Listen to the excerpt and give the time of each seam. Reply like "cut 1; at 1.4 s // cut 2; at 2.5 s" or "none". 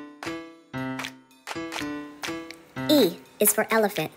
none